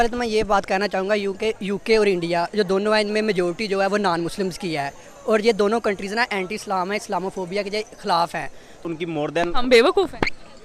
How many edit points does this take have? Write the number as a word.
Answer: one